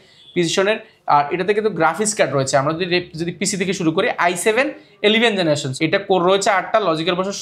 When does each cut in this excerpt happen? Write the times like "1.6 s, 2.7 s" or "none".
5.7 s